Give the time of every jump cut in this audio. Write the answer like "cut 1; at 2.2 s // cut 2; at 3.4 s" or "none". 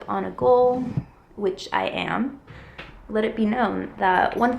cut 1; at 2.4 s